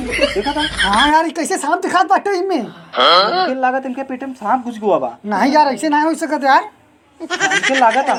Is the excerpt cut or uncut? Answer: uncut